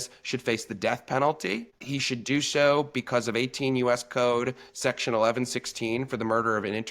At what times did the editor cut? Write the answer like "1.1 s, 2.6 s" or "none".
1.9 s